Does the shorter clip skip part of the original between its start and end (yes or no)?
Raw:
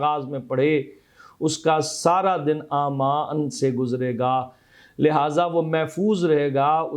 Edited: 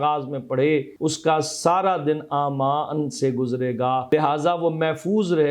yes